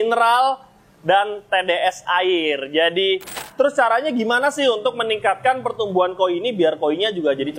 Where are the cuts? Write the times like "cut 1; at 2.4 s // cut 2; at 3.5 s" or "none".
cut 1; at 3.4 s